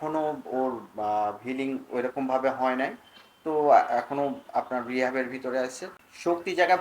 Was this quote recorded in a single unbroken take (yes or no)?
no